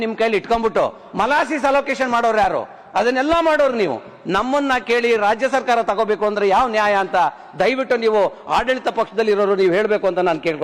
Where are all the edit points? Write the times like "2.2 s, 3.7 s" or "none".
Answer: none